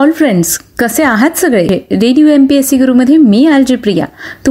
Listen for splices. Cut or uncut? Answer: cut